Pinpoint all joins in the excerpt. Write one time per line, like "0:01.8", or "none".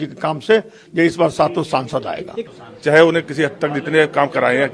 0:02.4